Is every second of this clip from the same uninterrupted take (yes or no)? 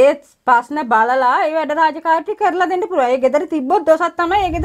yes